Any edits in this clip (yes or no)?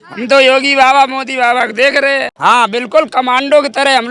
yes